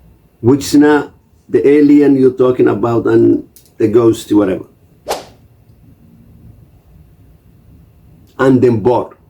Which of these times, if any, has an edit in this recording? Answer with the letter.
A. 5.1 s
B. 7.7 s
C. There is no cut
A